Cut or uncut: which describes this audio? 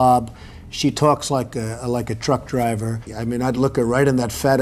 cut